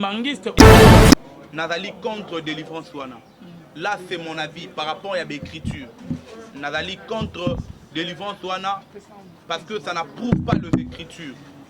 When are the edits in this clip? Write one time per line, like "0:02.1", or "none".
0:01.1